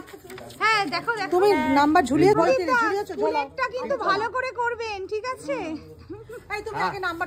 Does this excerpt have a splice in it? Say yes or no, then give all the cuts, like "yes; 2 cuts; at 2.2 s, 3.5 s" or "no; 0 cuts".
yes; 1 cut; at 2.3 s